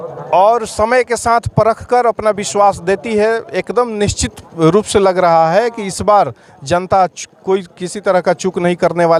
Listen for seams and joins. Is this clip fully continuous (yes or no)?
yes